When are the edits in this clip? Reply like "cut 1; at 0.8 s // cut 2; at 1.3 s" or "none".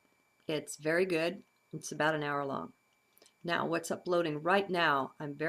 cut 1; at 2.2 s